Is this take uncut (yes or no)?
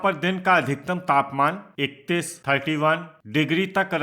no